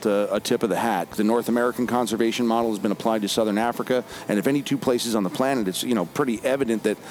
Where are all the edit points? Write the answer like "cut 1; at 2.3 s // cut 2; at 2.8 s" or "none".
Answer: cut 1; at 1.1 s